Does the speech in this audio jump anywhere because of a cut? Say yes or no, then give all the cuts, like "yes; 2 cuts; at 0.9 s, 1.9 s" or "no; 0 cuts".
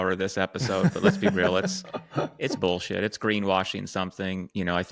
no; 0 cuts